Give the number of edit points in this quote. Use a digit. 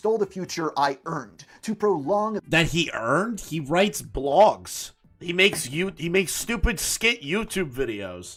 0